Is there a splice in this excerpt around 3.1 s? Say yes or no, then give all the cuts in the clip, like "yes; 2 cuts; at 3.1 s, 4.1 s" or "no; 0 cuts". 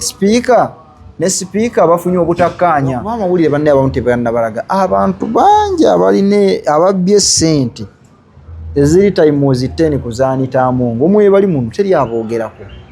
yes; 1 cut; at 3.1 s